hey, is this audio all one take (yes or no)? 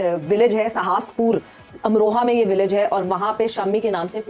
yes